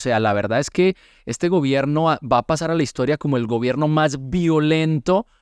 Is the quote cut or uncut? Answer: uncut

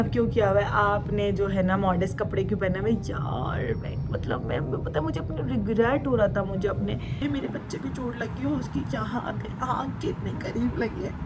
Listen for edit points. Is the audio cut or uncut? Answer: cut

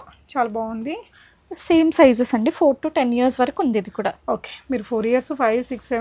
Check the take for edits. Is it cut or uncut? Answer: uncut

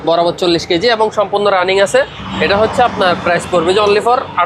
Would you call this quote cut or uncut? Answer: uncut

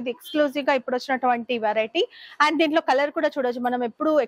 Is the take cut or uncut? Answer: uncut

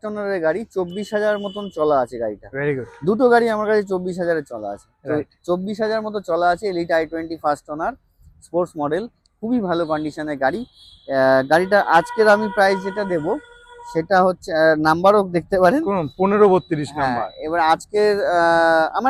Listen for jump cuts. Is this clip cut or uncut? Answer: uncut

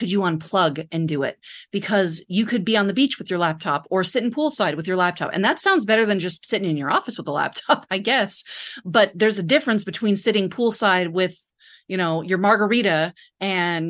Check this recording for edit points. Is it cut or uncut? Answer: uncut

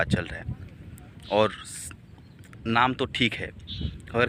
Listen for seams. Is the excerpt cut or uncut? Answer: uncut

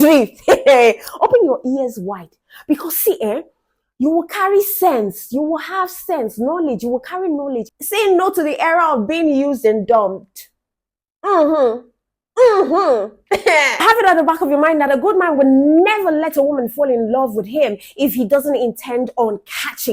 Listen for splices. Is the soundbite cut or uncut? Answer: cut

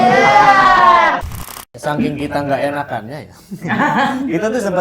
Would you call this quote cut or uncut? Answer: cut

